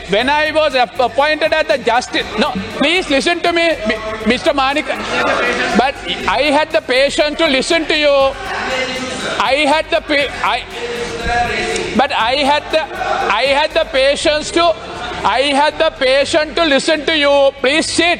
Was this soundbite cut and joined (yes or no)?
no